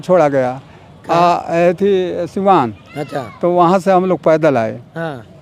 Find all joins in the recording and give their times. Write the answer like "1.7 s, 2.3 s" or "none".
none